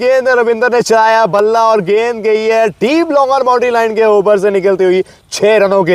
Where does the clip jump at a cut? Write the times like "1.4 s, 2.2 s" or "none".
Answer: none